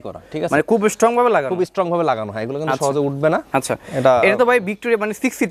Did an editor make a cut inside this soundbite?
no; 0 cuts

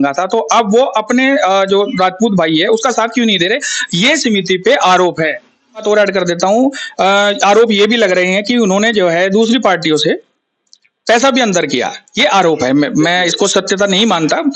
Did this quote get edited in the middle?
yes; 1 cut; at 5.8 s

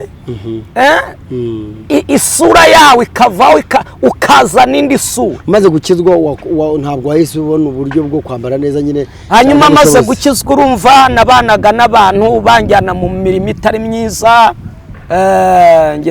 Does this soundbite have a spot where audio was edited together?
no; 0 cuts

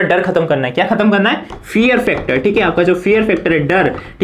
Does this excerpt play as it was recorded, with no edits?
yes; 0 cuts

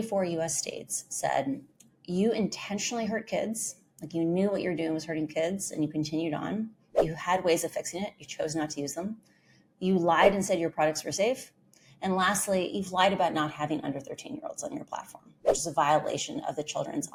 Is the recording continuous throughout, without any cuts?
yes; 0 cuts

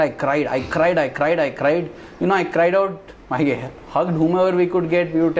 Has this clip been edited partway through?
no; 0 cuts

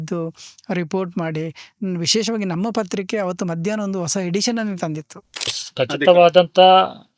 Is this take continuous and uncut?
no; 1 cut; at 5.6 s

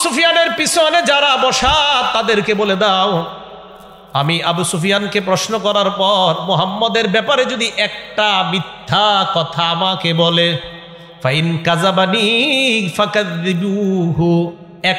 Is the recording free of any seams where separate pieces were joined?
yes; 0 cuts

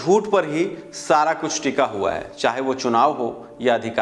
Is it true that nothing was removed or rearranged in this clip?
yes; 0 cuts

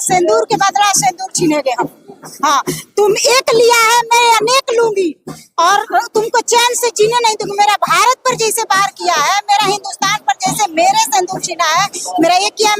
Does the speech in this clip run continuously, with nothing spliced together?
yes; 0 cuts

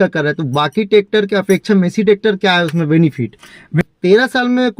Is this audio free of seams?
no; 1 cut; at 3.8 s

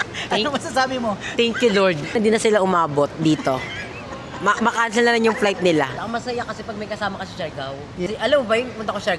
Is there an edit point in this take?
yes; 3 cuts; at 2.1 s, 5.9 s, 8.1 s

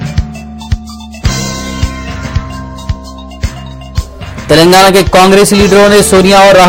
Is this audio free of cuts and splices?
yes; 0 cuts

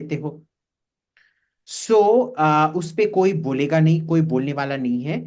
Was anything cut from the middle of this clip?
no; 0 cuts

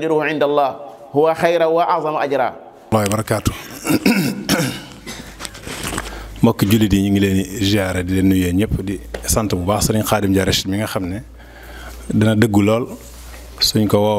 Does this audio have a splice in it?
yes; 1 cut; at 2.7 s

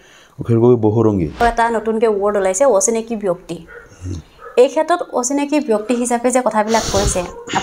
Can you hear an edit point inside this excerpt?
yes; 1 cut; at 1.4 s

